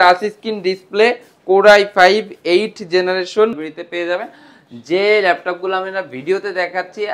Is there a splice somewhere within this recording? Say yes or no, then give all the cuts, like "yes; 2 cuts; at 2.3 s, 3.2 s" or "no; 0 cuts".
yes; 1 cut; at 3.5 s